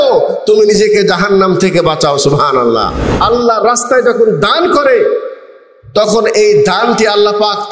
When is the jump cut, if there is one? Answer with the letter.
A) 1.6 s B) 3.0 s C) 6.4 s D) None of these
B